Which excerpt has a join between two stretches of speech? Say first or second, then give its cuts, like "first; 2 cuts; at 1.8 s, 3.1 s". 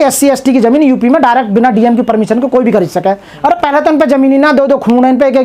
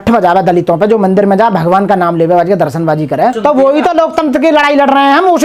second; 1 cut; at 3.4 s